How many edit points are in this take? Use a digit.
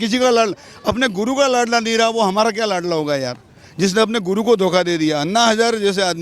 0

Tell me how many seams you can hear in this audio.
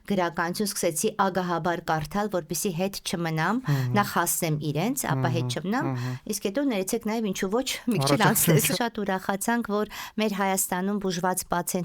1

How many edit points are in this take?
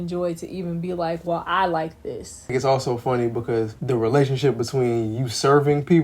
2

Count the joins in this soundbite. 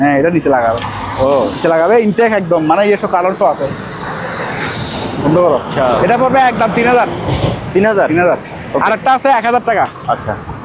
0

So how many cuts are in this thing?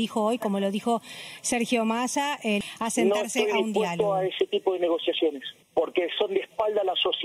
2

